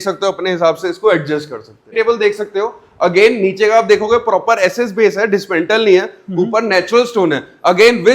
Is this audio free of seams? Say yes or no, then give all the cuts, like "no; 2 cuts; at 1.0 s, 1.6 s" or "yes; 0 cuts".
no; 1 cut; at 1.9 s